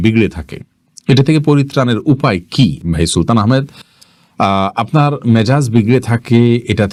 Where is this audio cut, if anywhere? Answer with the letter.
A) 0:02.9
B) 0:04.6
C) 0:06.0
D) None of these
D